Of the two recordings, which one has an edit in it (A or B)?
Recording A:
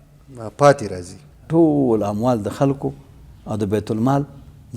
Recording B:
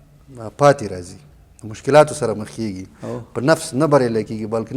A